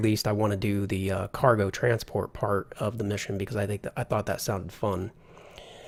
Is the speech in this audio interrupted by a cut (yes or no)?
no